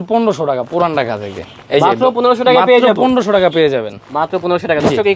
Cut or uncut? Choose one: uncut